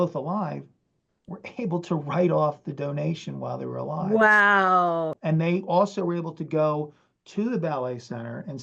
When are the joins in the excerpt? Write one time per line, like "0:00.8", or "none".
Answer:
0:05.1